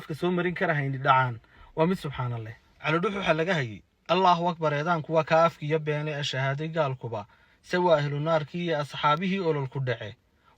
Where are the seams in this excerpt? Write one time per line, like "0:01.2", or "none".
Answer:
0:02.7